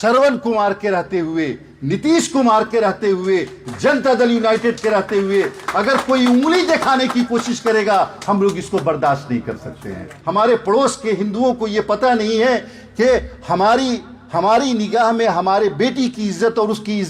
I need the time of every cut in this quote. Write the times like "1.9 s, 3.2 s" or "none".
10.1 s